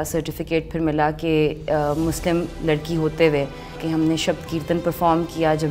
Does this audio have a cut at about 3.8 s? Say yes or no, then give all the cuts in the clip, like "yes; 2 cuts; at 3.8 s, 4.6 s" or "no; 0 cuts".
yes; 1 cut; at 3.8 s